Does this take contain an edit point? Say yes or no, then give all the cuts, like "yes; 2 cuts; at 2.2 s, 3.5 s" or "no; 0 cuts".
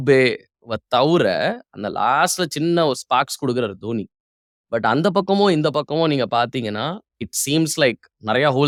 no; 0 cuts